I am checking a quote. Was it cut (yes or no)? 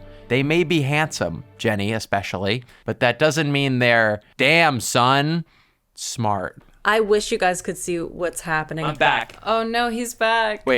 yes